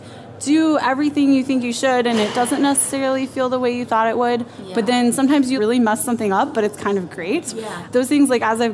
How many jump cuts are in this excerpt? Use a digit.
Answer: 2